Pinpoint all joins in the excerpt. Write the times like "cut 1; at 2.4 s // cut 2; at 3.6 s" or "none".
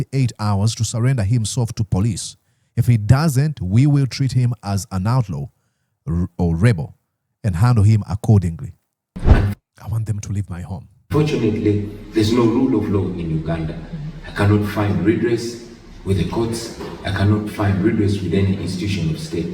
cut 1; at 9.2 s